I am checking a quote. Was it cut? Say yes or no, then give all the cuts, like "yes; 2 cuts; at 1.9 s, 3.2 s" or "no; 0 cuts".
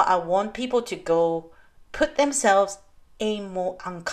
no; 0 cuts